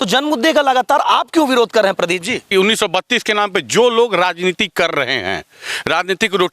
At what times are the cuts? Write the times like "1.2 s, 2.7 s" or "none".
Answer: 2.5 s